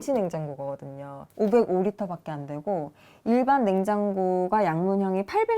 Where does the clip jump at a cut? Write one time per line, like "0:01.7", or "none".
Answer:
0:01.2